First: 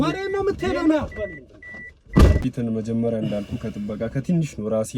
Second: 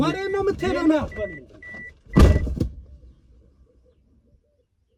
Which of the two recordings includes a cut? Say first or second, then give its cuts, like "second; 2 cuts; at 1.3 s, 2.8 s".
first; 1 cut; at 2.4 s